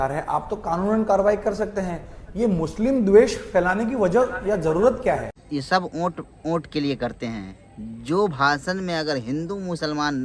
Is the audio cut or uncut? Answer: uncut